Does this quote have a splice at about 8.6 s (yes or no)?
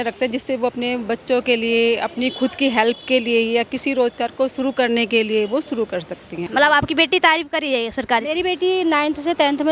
no